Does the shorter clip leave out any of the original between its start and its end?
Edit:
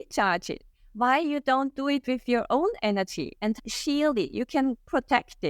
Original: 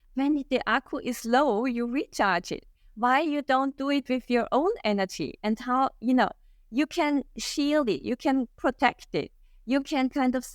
yes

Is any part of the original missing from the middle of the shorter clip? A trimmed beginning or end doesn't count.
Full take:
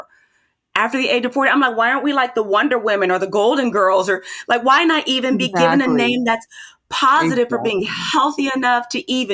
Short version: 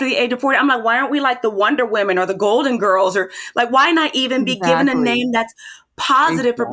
no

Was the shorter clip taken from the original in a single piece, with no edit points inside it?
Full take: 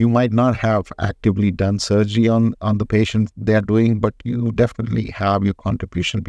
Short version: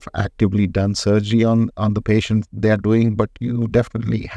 yes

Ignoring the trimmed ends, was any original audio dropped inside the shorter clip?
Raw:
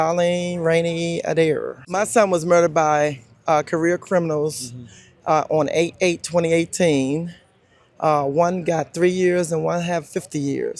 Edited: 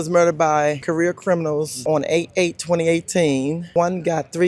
yes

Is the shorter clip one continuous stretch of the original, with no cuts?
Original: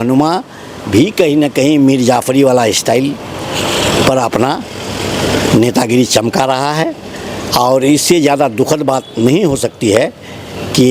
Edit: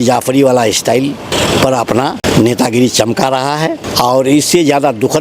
no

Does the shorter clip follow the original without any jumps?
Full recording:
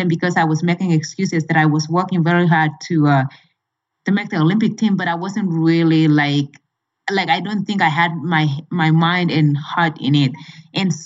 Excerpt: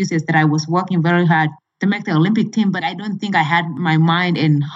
no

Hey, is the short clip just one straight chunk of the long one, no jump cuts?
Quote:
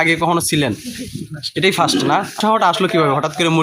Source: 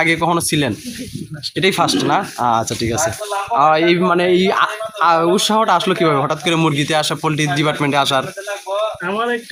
no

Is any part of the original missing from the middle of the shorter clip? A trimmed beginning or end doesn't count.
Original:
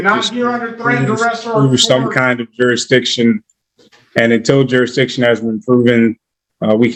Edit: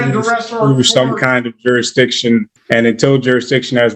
yes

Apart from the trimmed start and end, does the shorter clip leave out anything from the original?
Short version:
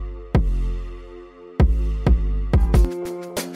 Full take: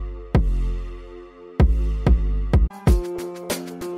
yes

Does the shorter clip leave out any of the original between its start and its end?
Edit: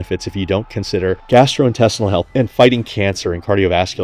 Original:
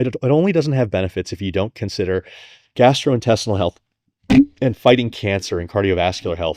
yes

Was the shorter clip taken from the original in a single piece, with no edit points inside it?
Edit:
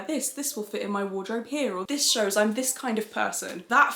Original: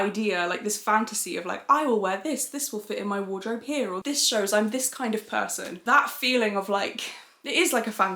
yes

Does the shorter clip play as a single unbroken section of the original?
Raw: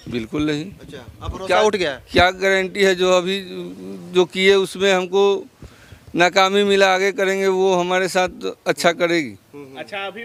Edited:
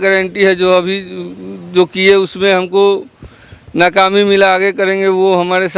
yes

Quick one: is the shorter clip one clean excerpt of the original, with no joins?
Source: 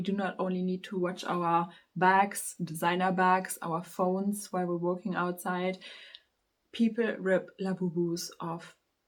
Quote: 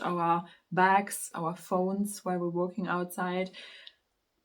no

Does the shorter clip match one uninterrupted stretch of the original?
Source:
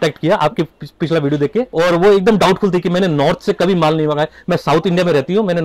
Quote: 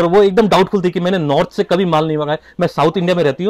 yes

